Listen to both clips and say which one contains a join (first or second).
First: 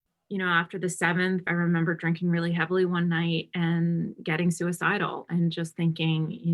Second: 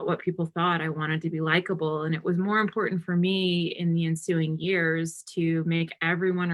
first